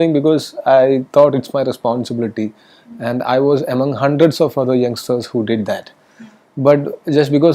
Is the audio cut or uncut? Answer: uncut